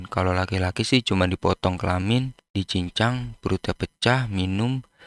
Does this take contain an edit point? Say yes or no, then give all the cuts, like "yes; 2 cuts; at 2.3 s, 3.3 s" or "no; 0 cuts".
no; 0 cuts